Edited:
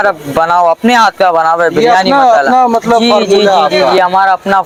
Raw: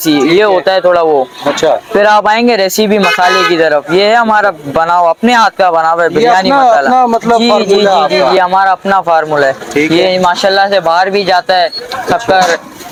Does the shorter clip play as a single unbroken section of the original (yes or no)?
yes